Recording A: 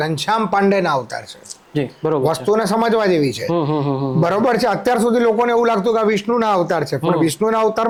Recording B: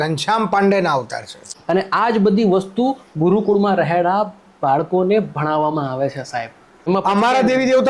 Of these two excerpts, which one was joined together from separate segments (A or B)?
B